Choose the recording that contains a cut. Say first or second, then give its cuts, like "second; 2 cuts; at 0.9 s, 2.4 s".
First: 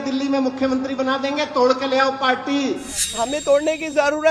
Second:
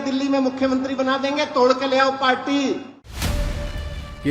first; 1 cut; at 3.0 s